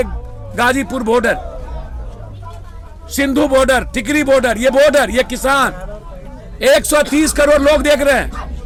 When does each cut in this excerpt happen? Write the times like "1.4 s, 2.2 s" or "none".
none

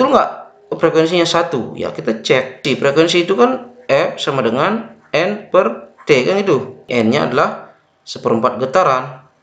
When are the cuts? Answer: 2.6 s, 6.9 s

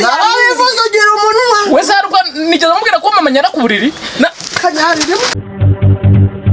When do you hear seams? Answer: 5.4 s

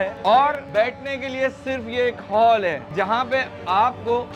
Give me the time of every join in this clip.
none

